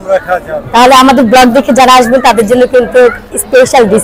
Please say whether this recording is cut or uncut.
uncut